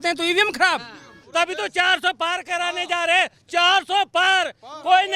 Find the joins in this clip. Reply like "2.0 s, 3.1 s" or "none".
1.1 s